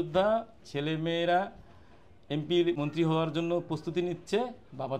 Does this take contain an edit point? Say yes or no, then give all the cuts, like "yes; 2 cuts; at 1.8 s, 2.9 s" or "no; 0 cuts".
yes; 1 cut; at 2.8 s